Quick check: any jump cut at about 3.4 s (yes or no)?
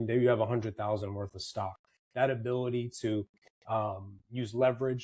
no